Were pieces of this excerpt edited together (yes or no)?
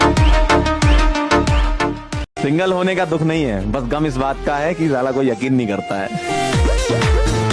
no